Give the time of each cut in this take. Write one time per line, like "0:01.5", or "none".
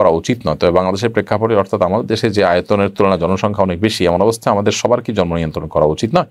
none